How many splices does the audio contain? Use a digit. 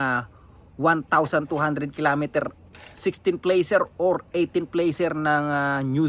0